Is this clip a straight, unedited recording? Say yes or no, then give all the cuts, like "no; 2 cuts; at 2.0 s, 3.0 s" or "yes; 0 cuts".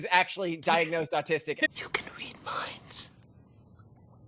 no; 1 cut; at 1.6 s